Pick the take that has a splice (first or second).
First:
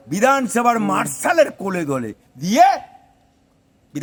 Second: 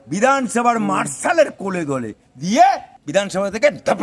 second